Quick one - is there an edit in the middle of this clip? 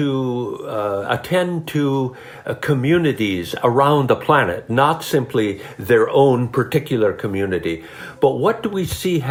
no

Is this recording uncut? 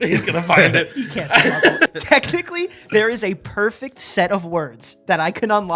no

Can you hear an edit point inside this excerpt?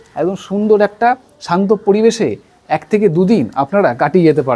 no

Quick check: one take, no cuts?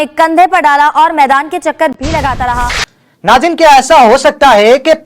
no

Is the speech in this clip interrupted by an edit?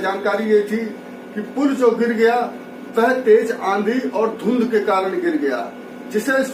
no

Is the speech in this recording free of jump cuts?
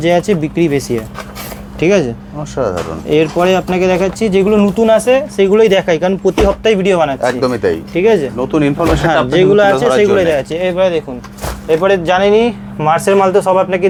yes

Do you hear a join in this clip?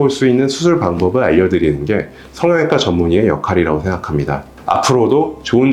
no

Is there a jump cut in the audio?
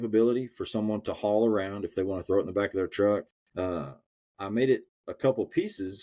yes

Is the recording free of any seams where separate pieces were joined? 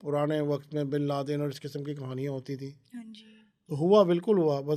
yes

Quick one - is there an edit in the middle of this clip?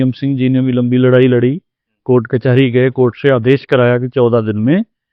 no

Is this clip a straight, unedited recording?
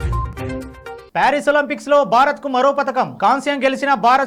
yes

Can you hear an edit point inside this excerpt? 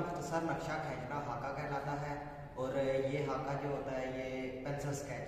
no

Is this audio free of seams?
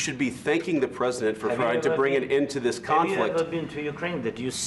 yes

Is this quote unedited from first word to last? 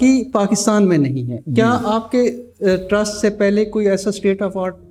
yes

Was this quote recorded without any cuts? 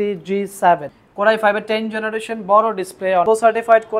no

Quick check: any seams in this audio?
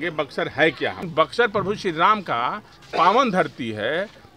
yes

